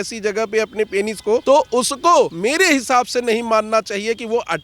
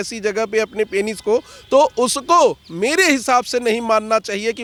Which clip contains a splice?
first; 2 cuts; at 1.4 s, 2.3 s

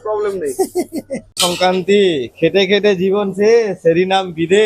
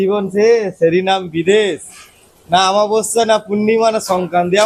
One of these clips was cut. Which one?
first; 1 cut; at 1.4 s

